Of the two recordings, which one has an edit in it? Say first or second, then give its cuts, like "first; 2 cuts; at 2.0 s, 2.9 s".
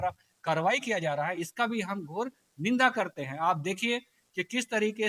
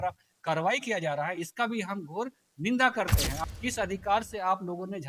second; 1 cut; at 3.4 s